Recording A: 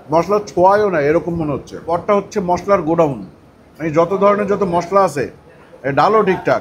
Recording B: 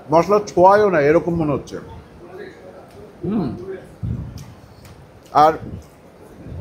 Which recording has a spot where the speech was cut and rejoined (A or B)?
A